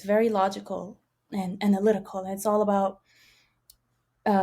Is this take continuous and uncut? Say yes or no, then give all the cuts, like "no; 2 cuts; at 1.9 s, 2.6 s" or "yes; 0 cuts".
yes; 0 cuts